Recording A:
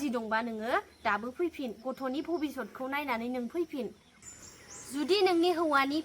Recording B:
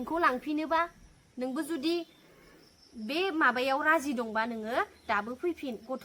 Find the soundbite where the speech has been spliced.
A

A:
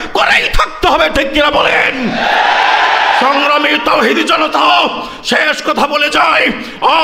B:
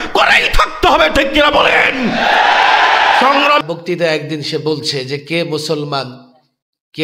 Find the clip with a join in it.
B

